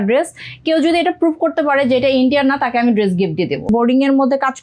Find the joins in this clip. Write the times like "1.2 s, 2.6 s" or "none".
3.7 s